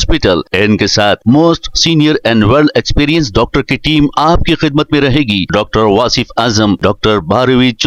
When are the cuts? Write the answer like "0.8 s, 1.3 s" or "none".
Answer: none